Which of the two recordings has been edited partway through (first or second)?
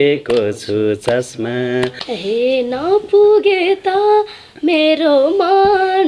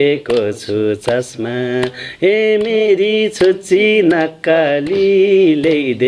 first